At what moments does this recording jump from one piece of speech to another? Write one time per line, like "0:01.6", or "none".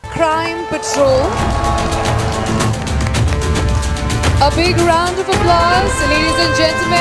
0:01.4